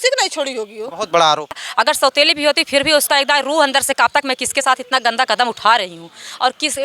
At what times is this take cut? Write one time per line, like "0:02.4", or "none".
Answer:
0:01.6